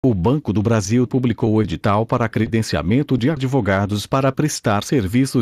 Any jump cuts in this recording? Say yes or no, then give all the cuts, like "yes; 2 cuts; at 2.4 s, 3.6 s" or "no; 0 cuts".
yes; 1 cut; at 0.9 s